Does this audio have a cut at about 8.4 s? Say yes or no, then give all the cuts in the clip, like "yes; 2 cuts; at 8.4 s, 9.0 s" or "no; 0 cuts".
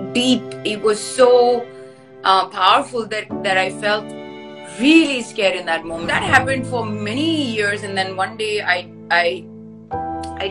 no; 1 cut; at 6.0 s